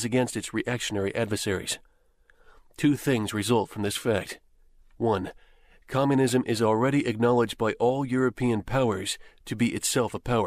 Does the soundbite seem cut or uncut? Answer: cut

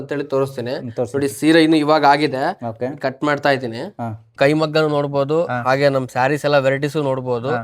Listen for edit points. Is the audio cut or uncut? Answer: cut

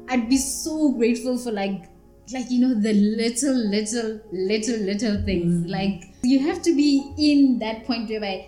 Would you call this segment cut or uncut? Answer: cut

